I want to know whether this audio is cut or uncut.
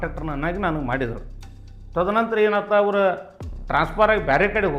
uncut